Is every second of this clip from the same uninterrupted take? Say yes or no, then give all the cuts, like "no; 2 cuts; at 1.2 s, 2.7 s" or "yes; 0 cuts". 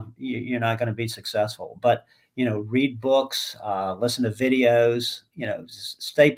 yes; 0 cuts